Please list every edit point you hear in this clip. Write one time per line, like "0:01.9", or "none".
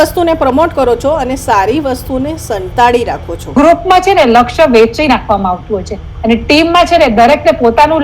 0:03.5